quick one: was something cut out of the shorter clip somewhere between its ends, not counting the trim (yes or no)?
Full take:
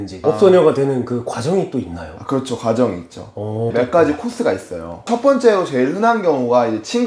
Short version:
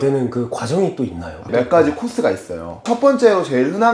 yes